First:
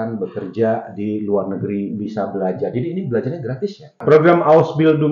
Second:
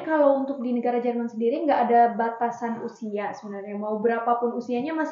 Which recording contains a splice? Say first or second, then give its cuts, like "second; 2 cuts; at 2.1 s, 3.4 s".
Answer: first; 1 cut; at 4.0 s